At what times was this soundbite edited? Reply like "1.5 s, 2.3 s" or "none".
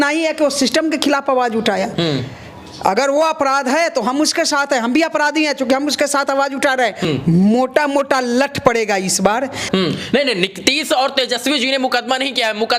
7.1 s, 9.7 s

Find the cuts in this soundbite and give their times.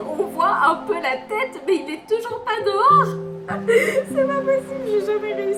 none

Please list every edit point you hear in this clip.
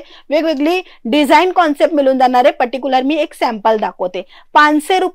none

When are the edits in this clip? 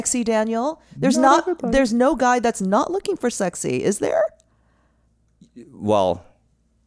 none

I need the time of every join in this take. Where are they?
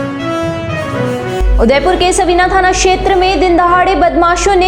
none

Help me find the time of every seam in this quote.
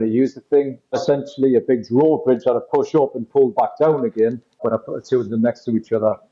0.9 s, 4.6 s

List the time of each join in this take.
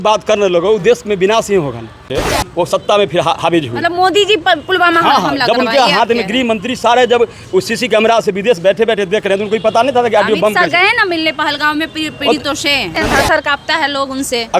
2.0 s, 12.9 s

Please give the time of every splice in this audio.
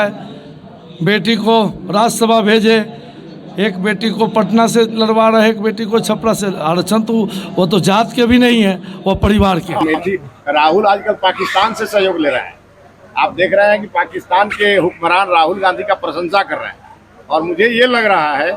9.8 s

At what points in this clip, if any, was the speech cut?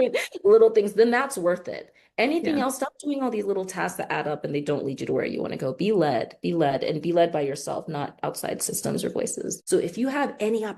9.6 s

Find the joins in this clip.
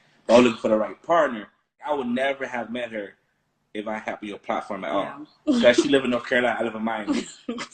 1.8 s

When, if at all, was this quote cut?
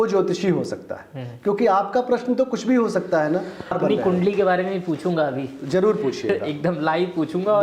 3.7 s

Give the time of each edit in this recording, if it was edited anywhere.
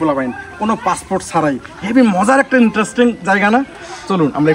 none

